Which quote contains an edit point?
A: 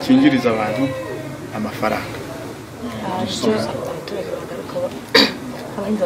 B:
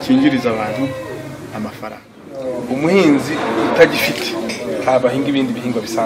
B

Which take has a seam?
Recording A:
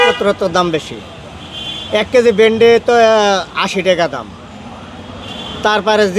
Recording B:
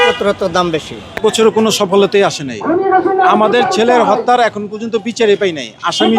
B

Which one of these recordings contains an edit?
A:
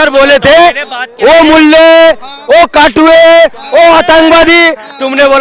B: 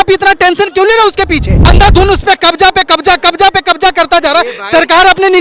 B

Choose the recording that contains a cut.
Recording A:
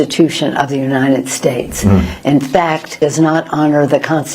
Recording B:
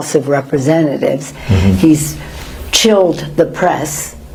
A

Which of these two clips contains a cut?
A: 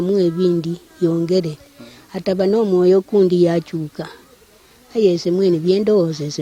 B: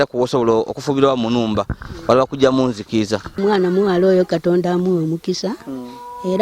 B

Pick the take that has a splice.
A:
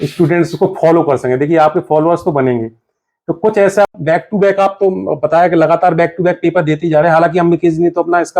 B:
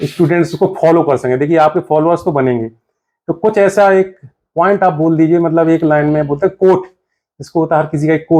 A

